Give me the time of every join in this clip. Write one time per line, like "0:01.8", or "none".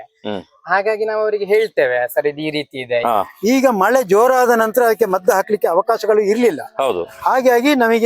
0:03.0